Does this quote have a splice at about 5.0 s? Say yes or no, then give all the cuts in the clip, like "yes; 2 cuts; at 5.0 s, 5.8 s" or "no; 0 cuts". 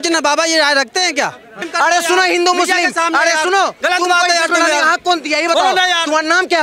no; 1 cut; at 1.6 s